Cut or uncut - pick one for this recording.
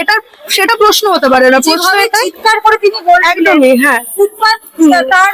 uncut